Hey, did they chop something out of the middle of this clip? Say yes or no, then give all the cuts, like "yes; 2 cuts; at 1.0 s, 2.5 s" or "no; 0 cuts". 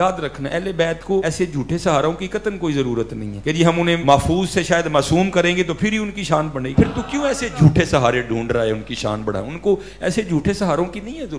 yes; 3 cuts; at 1.2 s, 3.7 s, 6.6 s